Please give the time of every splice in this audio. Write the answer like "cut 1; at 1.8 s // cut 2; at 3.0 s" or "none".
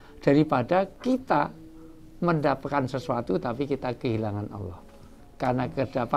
cut 1; at 0.9 s